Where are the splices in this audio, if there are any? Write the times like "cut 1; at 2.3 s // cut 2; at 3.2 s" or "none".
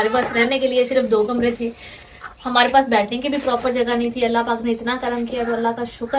none